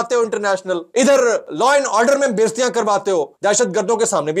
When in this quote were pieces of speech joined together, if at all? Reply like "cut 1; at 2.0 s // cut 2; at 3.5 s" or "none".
cut 1; at 0.8 s // cut 2; at 1.5 s